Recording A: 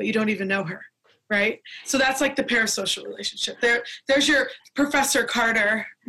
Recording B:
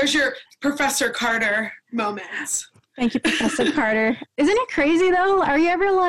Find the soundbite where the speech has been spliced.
B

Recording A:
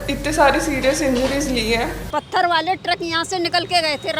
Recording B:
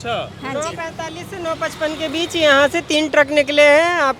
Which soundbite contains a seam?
A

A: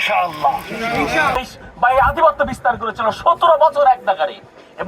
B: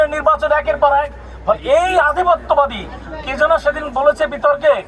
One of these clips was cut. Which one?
A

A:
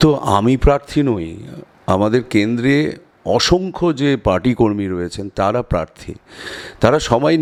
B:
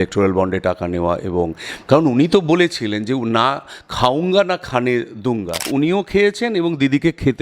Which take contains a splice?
B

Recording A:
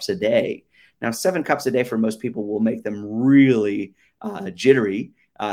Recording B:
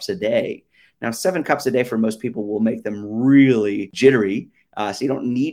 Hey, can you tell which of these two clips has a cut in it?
B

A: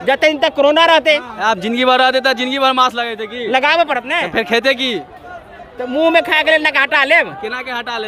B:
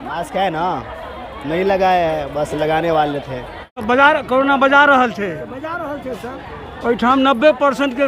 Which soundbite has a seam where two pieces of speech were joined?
B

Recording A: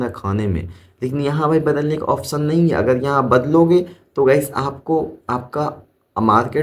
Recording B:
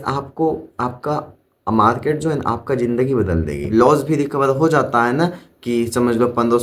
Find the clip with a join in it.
B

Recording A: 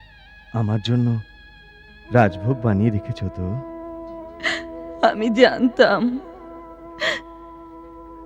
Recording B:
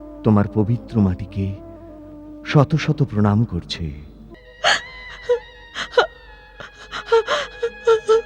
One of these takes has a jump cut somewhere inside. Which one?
B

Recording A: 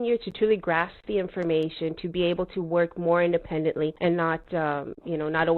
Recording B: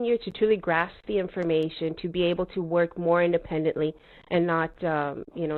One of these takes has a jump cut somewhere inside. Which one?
A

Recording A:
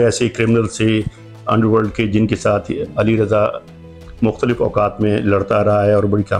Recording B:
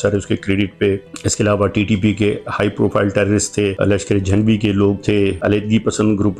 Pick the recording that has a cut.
B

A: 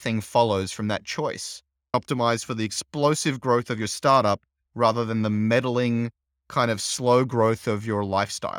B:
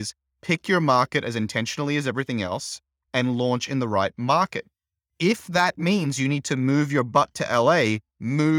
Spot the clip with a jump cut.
A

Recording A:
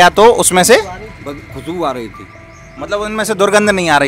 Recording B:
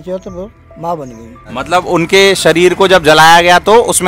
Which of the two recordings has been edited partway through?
B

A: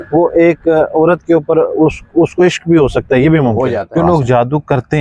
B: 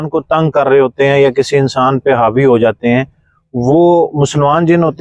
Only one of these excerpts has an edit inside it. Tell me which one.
A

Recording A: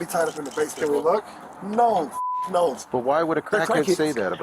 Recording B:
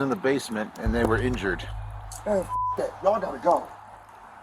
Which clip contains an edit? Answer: A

